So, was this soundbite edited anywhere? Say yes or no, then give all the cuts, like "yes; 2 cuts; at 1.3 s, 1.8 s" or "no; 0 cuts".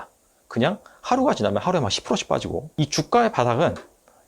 yes; 1 cut; at 2.7 s